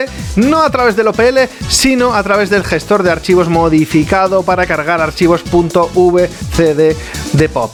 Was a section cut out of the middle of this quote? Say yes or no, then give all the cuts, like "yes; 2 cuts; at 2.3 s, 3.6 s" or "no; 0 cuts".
no; 0 cuts